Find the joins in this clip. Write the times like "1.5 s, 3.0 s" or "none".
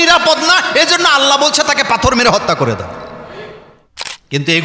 3.7 s